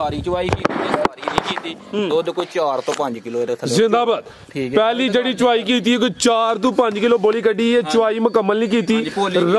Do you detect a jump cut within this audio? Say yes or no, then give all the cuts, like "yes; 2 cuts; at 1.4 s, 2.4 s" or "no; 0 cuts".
no; 0 cuts